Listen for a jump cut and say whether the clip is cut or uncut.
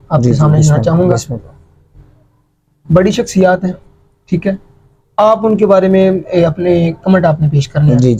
uncut